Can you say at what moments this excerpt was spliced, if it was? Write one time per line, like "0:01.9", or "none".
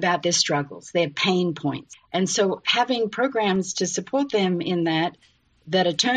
0:01.9